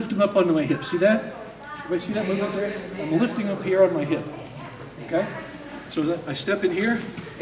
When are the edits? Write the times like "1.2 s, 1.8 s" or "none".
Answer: none